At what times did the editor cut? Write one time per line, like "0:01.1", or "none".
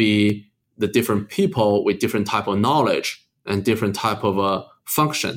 none